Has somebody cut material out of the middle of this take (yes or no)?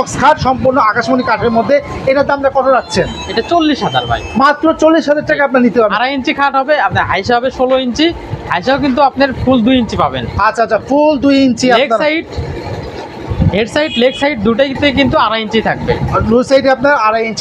no